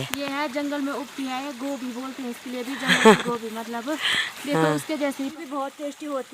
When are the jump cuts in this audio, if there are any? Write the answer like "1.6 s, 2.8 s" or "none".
5.3 s